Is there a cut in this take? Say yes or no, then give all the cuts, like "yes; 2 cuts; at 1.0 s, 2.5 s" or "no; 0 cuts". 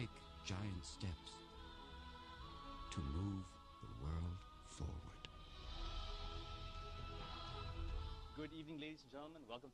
yes; 1 cut; at 2.4 s